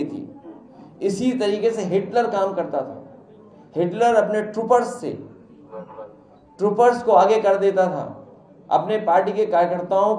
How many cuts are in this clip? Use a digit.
0